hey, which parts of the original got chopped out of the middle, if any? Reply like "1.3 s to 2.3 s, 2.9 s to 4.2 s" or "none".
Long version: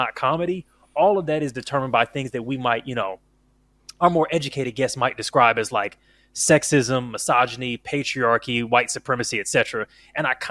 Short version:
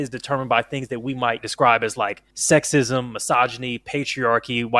2.9 s to 5.2 s, 6.0 s to 6.3 s

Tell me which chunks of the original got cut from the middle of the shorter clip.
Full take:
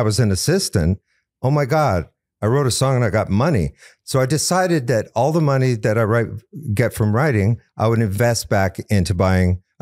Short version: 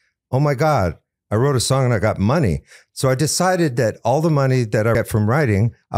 6.1 s to 6.8 s

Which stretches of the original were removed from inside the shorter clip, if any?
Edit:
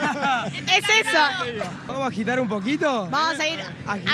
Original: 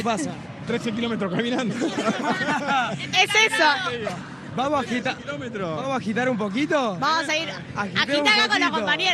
4.3 s to 5.8 s

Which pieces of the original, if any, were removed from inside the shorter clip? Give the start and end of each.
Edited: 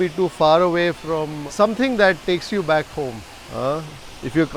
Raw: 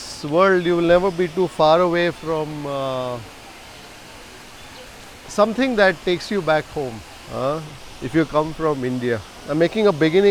2.6 s to 5.2 s

